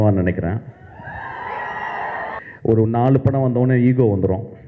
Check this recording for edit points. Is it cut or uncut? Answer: cut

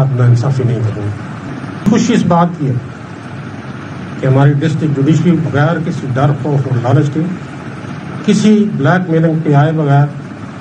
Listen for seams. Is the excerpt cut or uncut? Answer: cut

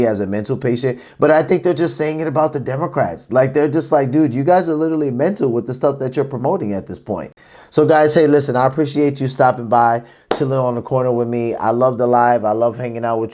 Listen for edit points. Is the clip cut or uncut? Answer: uncut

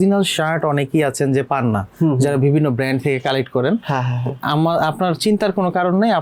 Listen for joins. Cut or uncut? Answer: uncut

